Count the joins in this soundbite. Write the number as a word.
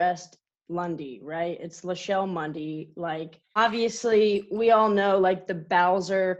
one